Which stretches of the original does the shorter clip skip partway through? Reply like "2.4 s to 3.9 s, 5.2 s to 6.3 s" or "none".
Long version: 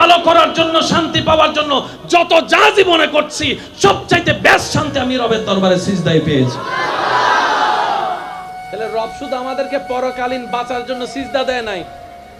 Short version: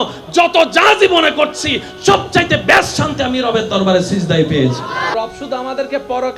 6.9 s to 8.9 s